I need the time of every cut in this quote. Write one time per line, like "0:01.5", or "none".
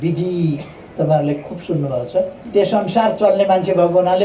0:02.4